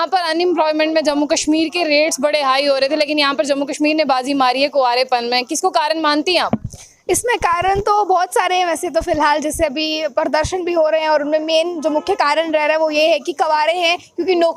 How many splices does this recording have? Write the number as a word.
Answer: zero